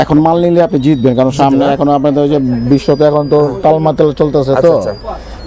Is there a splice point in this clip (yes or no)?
no